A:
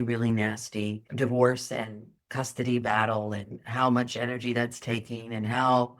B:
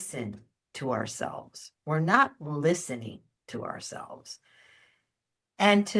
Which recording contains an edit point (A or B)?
A